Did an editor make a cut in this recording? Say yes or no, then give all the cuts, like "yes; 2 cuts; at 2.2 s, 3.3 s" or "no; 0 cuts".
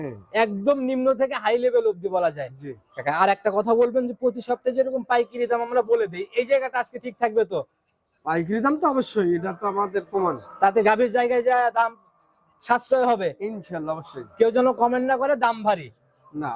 no; 0 cuts